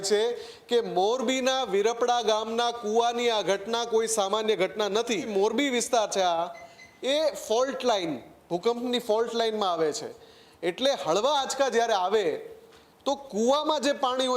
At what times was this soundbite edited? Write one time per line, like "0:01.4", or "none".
0:05.3